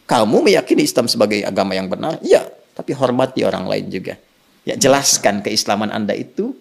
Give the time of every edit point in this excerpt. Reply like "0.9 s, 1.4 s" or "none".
none

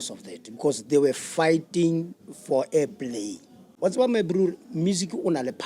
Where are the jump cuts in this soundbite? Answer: 3.7 s

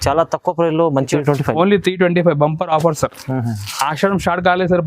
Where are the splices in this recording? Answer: 1.1 s

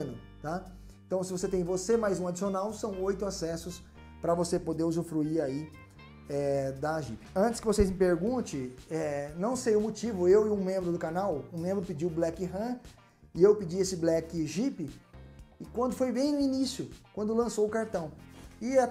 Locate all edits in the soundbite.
7.1 s

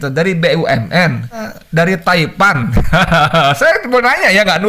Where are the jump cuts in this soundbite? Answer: 1.4 s

